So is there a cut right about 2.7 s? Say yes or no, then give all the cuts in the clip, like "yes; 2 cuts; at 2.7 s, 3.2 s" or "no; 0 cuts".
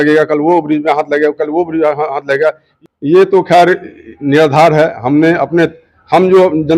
yes; 1 cut; at 2.7 s